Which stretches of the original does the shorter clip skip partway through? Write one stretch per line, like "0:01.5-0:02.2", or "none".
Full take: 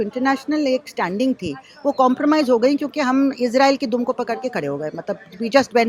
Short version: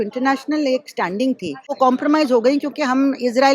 0:01.6-0:01.8